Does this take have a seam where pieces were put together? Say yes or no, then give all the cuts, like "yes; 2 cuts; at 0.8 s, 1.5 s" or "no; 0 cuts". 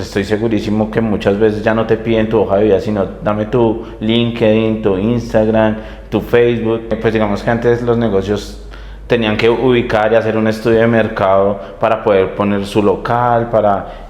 yes; 1 cut; at 7.0 s